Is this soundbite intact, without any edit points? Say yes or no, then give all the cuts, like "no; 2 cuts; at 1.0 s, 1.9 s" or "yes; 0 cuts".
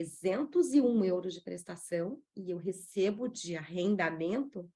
yes; 0 cuts